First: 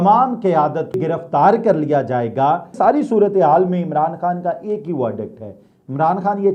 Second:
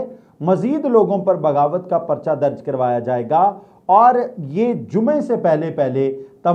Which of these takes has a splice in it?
first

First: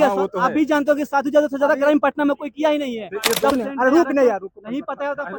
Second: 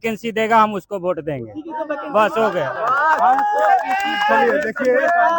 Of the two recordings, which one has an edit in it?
first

